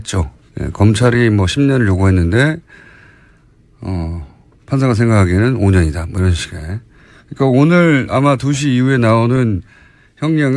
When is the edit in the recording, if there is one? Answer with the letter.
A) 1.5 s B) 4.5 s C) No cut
A